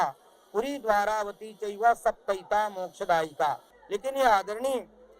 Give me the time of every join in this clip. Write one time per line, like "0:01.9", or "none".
0:03.7